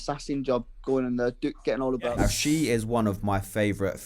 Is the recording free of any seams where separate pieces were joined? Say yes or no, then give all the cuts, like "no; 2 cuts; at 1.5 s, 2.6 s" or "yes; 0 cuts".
no; 1 cut; at 2.2 s